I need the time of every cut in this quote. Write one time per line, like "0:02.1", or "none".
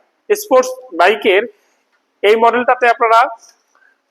none